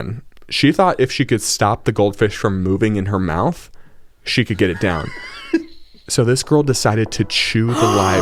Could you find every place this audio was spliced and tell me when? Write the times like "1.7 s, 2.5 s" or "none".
none

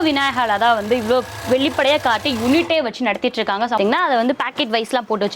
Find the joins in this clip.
3.8 s

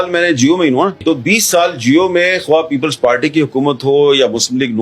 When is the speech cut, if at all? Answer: 1.0 s

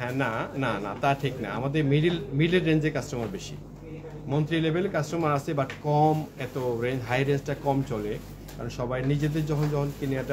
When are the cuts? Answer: none

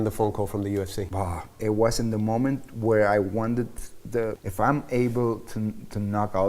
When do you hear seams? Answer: 1.0 s, 4.4 s

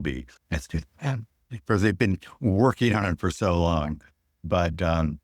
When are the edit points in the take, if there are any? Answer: none

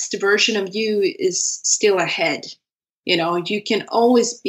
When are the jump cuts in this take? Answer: none

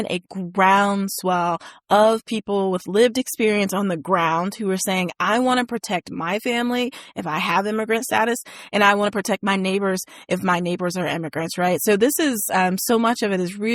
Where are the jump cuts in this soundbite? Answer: none

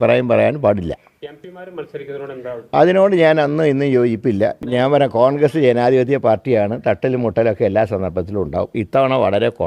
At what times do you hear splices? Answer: 4.6 s

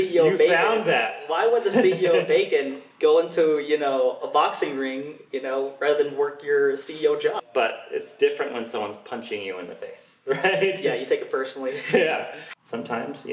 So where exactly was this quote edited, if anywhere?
7.4 s, 12.4 s

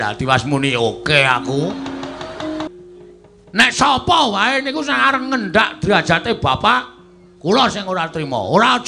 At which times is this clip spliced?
2.7 s

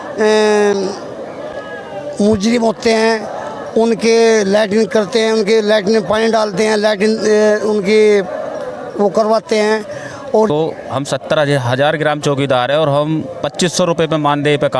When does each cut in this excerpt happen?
10.5 s

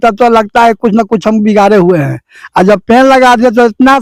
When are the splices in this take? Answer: none

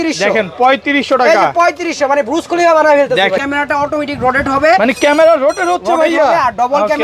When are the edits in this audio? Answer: 3.4 s

